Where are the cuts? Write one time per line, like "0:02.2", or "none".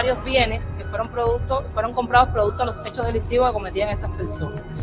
none